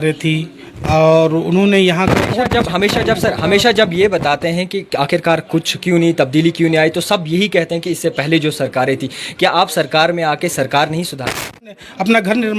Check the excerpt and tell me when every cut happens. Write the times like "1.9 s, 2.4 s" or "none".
11.7 s